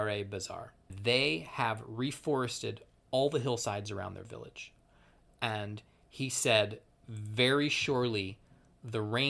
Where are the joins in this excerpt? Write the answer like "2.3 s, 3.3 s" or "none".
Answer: 0.9 s